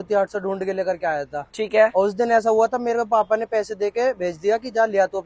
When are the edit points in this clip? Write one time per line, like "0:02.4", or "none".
none